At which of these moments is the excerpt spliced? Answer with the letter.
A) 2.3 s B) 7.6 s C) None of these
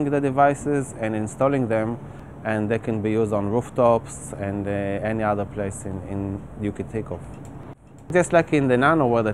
B